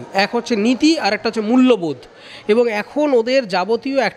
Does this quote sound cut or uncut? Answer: uncut